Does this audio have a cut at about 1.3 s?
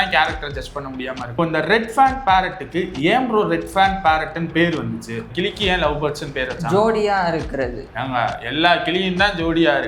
yes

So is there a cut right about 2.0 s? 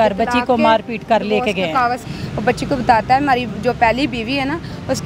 yes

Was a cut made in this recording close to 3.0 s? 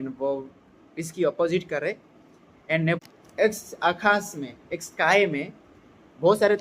yes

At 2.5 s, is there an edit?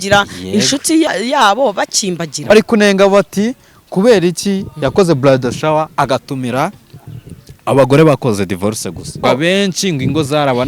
yes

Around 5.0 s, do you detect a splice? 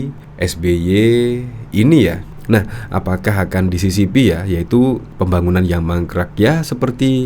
no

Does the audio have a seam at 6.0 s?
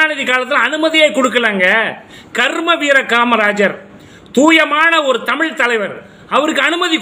no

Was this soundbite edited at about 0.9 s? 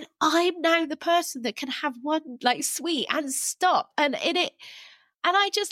no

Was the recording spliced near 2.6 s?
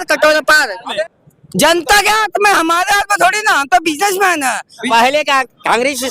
no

